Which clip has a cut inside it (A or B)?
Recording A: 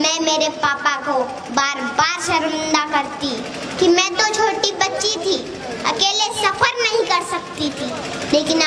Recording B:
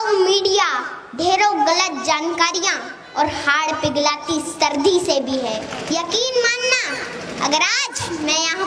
B